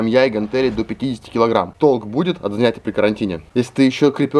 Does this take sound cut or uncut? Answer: cut